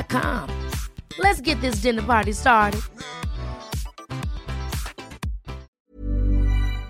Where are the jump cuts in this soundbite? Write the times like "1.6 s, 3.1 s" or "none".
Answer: 5.7 s